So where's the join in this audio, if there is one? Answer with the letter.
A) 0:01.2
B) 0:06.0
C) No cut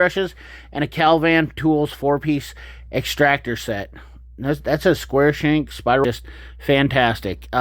B